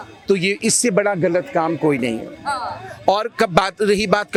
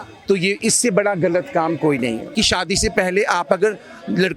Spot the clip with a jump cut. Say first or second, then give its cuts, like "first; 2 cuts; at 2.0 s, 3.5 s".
second; 1 cut; at 2.2 s